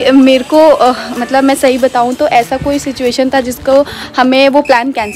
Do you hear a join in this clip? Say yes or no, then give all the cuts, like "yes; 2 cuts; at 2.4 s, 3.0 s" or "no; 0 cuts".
no; 0 cuts